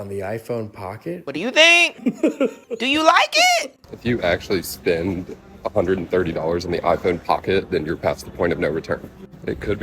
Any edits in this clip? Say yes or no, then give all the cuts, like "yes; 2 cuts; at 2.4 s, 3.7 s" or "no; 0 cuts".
yes; 3 cuts; at 1.2 s, 2.6 s, 3.9 s